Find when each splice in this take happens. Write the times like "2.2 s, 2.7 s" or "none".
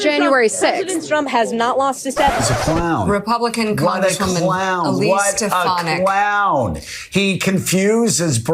2.4 s